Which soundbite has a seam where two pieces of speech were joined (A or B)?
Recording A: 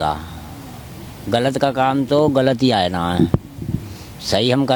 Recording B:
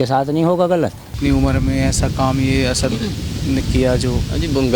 B